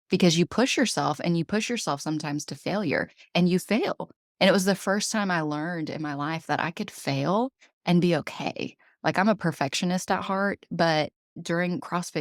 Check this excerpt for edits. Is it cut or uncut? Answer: uncut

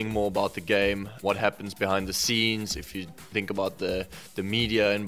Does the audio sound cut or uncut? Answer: cut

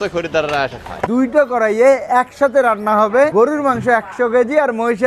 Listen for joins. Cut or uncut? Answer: cut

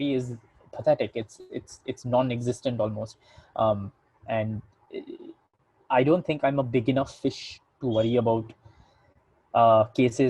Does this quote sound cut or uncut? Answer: uncut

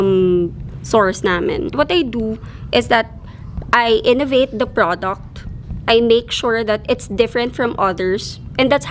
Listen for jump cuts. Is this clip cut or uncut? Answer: cut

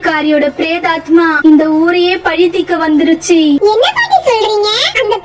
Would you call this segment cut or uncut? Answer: uncut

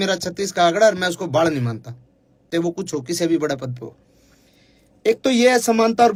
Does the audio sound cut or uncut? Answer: uncut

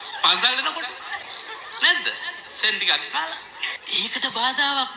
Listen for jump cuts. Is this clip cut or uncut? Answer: cut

